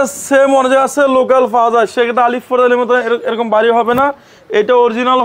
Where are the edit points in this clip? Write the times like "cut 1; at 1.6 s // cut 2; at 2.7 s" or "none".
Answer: none